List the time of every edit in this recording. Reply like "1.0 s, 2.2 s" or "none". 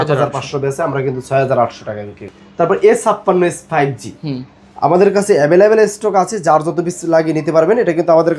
2.4 s

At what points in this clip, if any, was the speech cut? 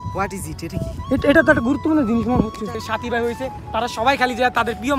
2.8 s

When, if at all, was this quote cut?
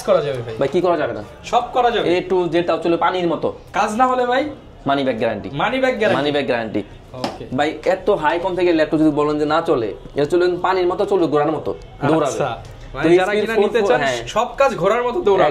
none

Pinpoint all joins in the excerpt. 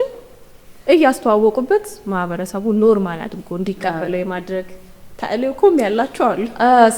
none

